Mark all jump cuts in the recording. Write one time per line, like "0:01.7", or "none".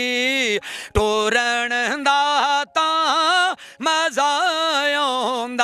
none